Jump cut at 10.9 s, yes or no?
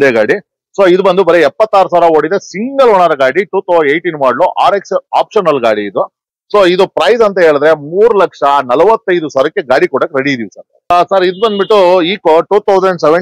yes